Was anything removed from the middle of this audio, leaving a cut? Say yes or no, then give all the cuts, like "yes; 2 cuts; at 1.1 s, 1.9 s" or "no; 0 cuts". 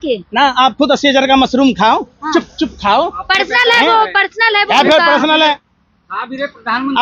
no; 0 cuts